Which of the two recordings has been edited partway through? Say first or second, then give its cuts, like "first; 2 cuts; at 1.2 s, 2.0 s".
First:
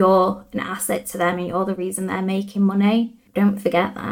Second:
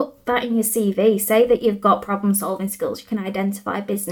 first; 1 cut; at 3.2 s